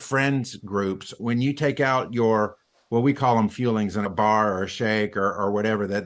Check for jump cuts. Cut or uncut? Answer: cut